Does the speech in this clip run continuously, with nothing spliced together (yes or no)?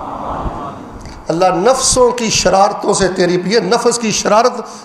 yes